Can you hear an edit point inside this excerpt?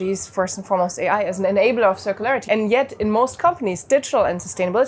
yes; 1 cut; at 2.4 s

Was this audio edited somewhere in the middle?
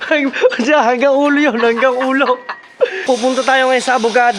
yes; 1 cut; at 3.0 s

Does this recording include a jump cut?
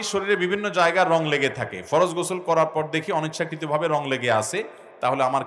no; 0 cuts

